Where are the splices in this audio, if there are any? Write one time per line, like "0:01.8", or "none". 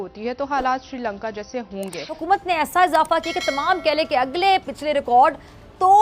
0:02.2